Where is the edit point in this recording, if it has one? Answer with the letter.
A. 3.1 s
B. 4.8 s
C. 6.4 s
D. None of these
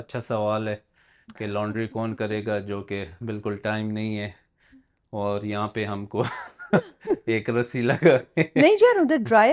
D